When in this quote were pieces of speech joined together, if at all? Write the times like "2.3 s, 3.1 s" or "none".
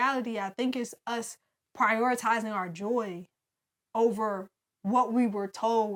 none